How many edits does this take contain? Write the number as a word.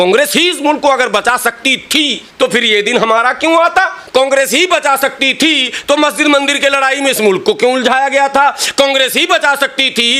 two